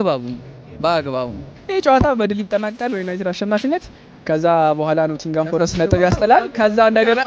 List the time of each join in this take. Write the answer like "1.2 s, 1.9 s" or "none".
1.5 s